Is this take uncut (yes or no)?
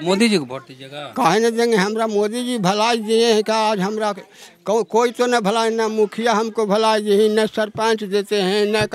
yes